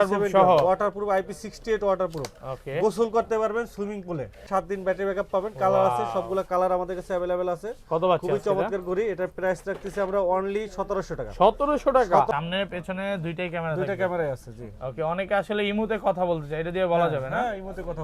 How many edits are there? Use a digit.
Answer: 2